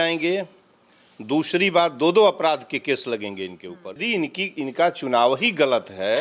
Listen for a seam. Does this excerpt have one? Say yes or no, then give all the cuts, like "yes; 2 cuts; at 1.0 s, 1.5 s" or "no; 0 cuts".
yes; 1 cut; at 4.0 s